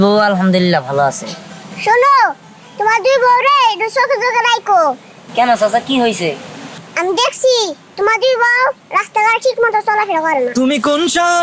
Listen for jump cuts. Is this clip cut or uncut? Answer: cut